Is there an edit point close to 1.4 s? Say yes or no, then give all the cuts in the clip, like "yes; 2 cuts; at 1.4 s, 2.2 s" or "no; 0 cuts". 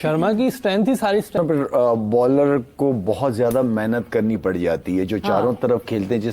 yes; 1 cut; at 1.4 s